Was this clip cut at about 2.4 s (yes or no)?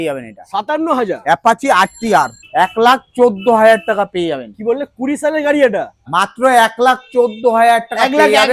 yes